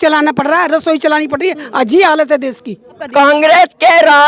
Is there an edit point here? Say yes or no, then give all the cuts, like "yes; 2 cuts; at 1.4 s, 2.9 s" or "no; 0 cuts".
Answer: yes; 1 cut; at 3.0 s